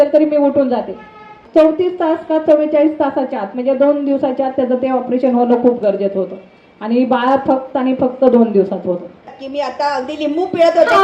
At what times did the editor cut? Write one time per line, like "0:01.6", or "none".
0:01.4
0:09.4

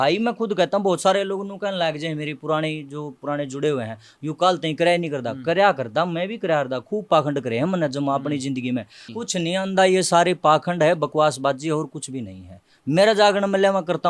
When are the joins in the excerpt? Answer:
0:09.0

